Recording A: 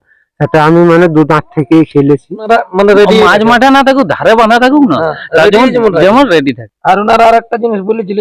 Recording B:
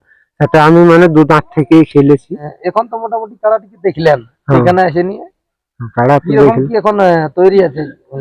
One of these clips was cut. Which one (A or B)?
A